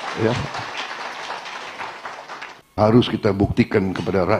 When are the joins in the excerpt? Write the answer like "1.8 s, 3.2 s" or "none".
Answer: 2.8 s